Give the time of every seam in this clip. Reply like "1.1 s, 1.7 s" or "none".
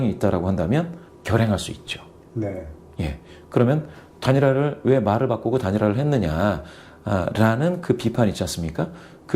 1.1 s